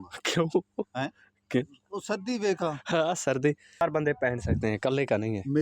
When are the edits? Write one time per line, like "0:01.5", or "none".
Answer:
0:03.8